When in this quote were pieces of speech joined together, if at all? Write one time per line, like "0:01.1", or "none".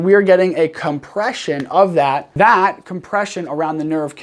0:02.3